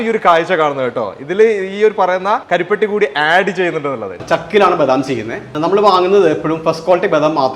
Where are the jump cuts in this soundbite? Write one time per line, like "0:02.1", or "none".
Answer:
0:02.4
0:04.2
0:05.5